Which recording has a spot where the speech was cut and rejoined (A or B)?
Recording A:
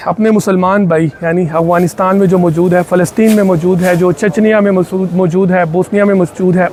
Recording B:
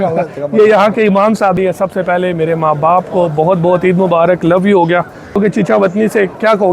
B